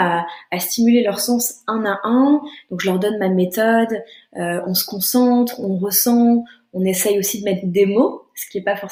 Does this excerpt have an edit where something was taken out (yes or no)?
no